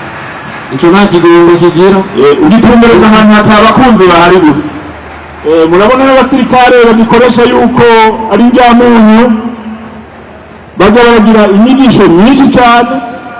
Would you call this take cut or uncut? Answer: uncut